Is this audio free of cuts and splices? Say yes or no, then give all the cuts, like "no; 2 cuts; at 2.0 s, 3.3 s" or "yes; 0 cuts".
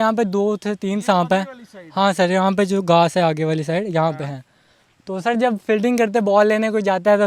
yes; 0 cuts